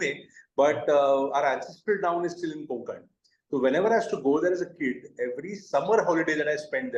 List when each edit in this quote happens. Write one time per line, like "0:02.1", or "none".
none